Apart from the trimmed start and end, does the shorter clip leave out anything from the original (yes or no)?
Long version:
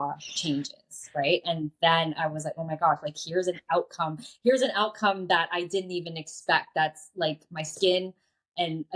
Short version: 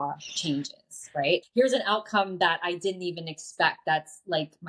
yes